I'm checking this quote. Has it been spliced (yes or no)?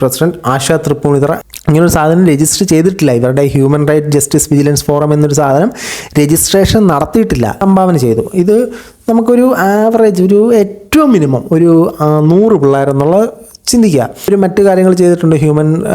yes